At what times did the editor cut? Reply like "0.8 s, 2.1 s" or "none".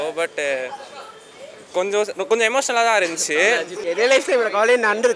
3.7 s